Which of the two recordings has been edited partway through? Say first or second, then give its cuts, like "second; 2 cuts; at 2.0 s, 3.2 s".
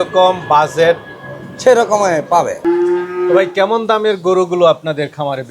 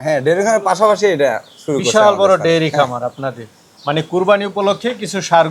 first; 1 cut; at 2.6 s